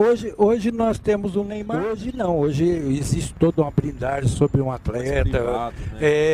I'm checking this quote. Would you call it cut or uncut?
cut